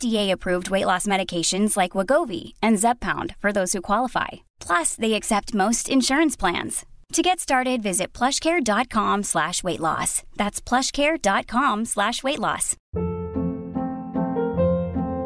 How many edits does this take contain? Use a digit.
1